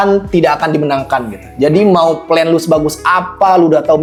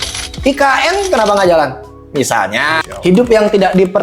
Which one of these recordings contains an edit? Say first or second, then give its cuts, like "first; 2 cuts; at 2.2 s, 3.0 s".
second; 1 cut; at 2.8 s